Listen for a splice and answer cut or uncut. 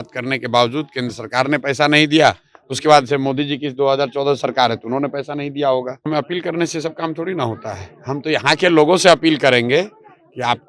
cut